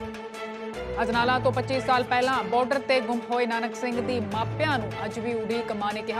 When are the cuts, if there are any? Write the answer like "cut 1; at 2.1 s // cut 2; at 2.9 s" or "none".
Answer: cut 1; at 1.0 s